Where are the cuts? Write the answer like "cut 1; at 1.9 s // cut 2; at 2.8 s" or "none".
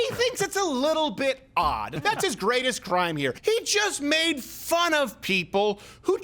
cut 1; at 1.9 s // cut 2; at 3.4 s